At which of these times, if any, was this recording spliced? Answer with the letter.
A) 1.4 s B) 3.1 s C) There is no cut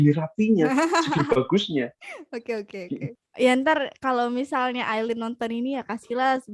B